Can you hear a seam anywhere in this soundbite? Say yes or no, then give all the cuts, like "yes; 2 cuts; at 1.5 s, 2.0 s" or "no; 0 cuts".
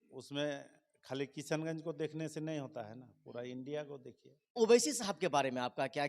yes; 1 cut; at 4.5 s